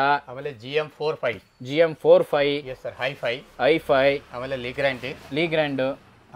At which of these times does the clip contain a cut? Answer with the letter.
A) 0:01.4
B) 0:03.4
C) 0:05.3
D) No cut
D